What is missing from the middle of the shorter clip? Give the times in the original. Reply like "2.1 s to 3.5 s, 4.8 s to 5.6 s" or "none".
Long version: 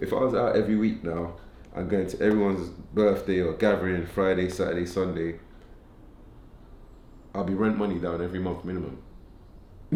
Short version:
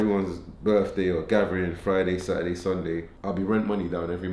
5.4 s to 7.2 s